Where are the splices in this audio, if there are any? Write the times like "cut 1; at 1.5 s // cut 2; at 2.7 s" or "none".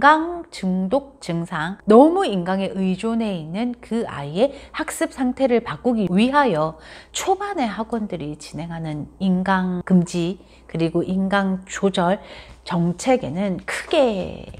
cut 1; at 1.7 s